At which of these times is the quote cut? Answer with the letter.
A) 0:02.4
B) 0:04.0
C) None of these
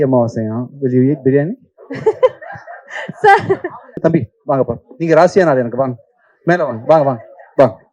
B